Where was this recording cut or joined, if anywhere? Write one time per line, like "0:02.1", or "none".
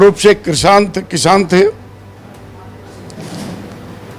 none